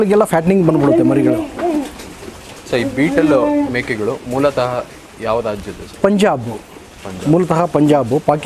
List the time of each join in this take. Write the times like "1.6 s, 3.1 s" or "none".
none

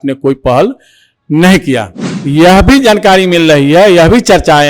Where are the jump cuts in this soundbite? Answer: 2.2 s

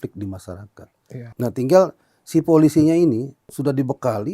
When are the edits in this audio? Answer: 1.2 s, 3.4 s

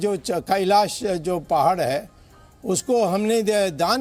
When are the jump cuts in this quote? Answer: none

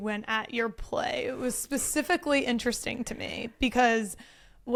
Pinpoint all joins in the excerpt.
none

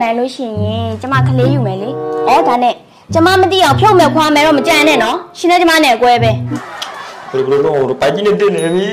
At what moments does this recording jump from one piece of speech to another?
6.5 s

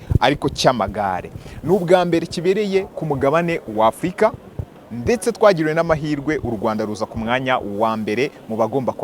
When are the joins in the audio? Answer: none

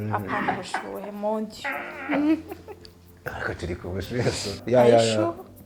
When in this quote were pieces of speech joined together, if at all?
4.6 s

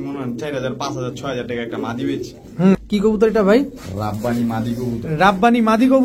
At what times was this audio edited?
2.7 s

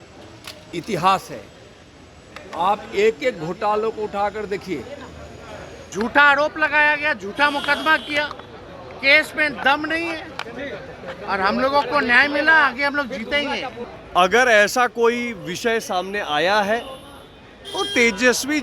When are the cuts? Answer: 5.8 s, 13.9 s

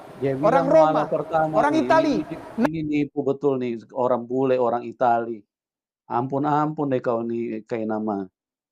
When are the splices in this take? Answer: none

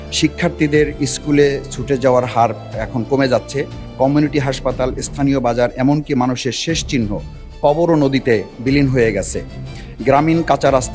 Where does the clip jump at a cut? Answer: none

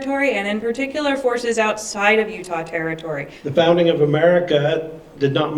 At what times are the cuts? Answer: 3.3 s

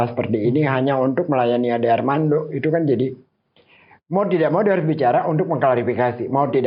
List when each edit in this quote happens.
none

